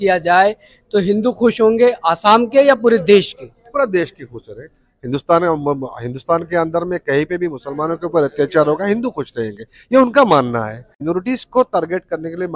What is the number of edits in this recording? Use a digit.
1